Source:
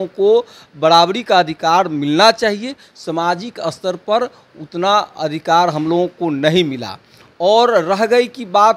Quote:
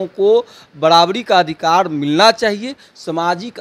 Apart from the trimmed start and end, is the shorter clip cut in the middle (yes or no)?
no